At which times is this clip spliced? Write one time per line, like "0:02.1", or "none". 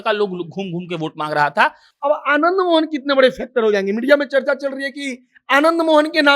0:01.9